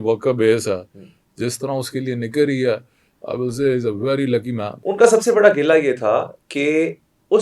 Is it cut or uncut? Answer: cut